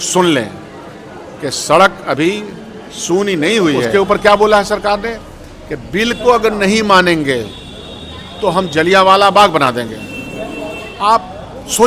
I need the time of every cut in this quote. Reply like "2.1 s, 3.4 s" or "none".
3.8 s